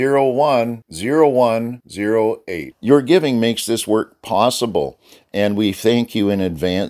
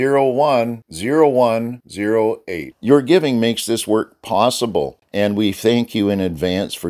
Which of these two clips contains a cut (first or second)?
second